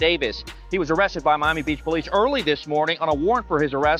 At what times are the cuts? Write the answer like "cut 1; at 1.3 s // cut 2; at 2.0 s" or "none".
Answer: none